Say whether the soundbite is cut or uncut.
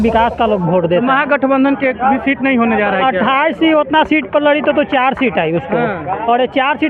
uncut